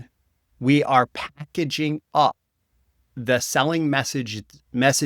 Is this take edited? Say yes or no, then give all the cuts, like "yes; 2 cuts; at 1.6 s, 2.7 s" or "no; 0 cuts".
no; 0 cuts